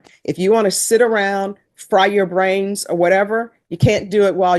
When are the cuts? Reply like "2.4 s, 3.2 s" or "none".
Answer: none